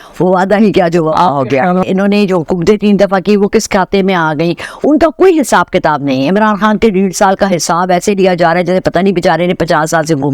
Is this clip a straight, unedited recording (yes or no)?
no